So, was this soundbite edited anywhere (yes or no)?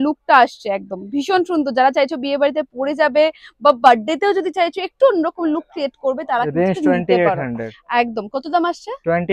no